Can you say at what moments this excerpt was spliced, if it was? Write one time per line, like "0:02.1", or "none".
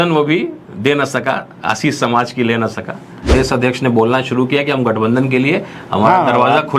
0:03.3